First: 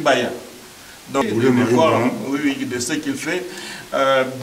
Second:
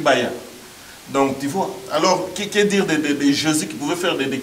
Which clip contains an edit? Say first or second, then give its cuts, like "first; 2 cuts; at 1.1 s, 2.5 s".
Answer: first; 1 cut; at 1.2 s